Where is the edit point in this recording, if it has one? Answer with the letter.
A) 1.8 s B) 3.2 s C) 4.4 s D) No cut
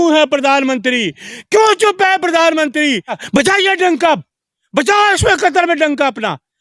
B